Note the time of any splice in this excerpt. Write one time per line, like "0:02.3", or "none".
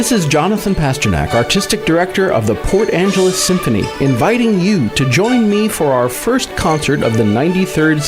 none